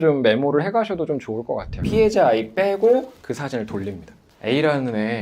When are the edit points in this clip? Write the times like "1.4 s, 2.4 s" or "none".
1.7 s